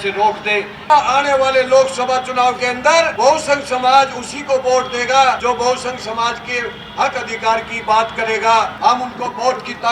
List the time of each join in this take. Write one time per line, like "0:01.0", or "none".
0:00.8
0:03.1
0:05.4
0:08.7